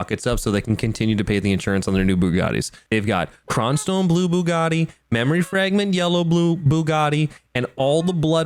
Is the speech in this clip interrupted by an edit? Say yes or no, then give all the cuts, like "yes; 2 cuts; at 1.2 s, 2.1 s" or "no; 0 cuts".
no; 0 cuts